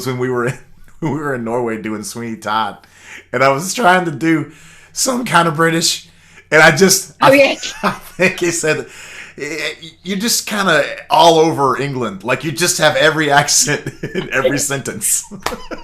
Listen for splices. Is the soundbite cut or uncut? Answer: uncut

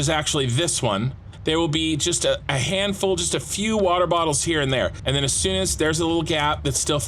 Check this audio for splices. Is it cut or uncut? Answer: cut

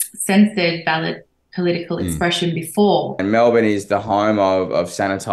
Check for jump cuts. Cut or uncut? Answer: cut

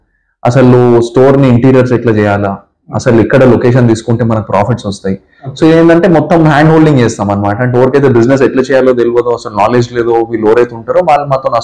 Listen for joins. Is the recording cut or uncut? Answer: uncut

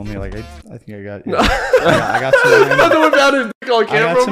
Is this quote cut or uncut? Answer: uncut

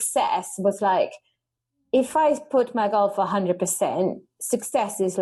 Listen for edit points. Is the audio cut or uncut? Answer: uncut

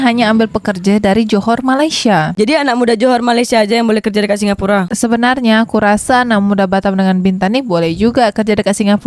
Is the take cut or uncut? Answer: uncut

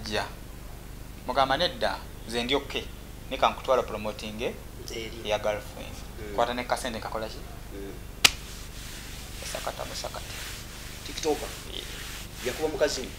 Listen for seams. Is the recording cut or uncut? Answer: uncut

